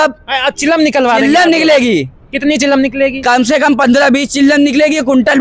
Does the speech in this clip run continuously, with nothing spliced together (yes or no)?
yes